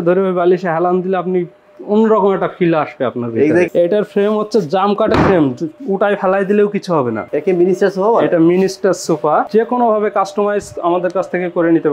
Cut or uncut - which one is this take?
cut